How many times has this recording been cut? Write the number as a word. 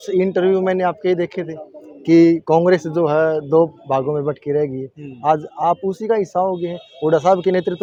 zero